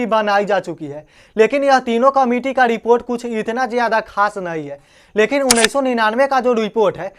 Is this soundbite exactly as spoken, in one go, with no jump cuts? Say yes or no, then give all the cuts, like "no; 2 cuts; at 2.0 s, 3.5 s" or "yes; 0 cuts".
yes; 0 cuts